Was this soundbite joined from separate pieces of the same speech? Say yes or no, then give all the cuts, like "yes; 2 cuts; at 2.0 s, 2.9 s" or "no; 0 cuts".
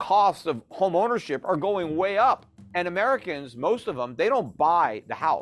yes; 1 cut; at 2.6 s